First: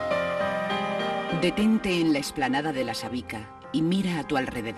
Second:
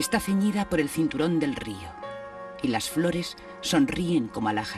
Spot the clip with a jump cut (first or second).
second